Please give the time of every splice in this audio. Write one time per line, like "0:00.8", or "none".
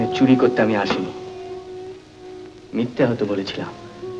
none